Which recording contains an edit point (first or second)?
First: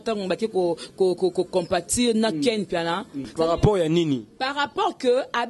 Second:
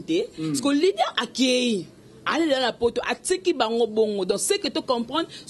first